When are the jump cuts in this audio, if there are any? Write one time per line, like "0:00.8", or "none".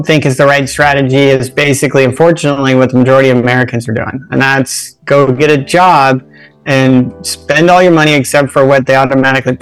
none